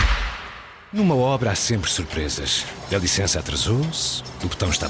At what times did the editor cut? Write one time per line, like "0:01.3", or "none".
0:01.0